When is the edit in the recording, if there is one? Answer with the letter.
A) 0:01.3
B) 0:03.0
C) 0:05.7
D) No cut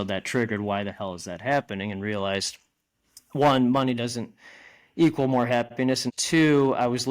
C